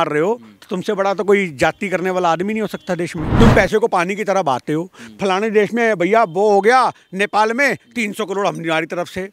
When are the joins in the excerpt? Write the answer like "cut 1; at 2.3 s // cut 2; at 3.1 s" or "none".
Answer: cut 1; at 3.2 s